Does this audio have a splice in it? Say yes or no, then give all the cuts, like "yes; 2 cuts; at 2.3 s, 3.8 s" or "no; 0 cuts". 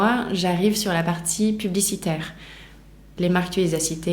yes; 1 cut; at 3.1 s